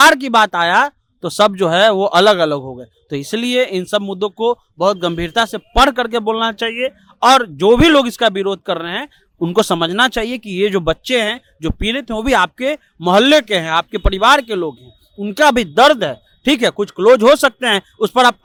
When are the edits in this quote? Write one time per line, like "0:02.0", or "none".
none